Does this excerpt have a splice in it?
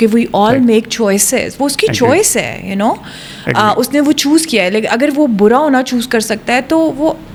no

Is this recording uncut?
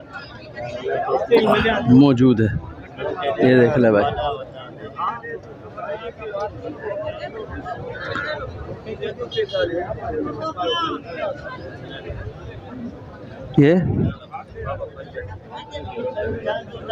yes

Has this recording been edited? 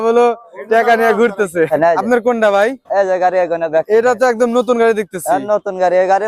yes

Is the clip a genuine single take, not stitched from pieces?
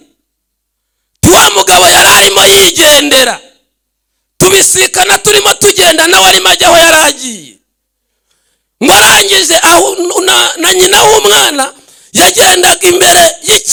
yes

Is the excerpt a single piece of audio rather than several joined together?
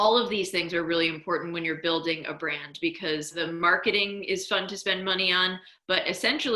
no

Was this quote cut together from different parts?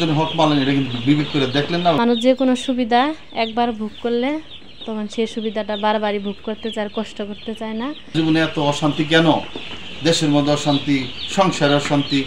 yes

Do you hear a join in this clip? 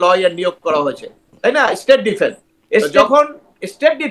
yes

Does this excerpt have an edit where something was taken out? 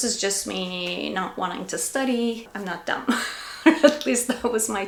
no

